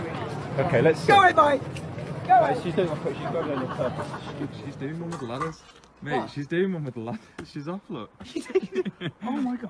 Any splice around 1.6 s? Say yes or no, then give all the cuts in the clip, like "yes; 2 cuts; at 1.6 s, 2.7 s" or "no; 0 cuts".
no; 1 cut; at 4.6 s